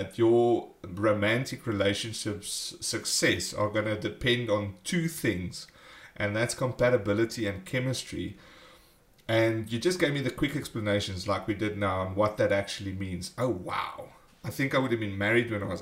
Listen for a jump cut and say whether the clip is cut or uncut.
cut